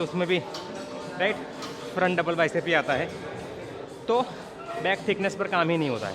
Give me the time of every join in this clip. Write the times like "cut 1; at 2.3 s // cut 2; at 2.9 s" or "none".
cut 1; at 4.7 s